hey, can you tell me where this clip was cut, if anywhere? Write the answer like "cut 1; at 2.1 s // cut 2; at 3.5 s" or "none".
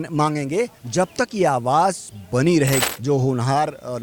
cut 1; at 2.9 s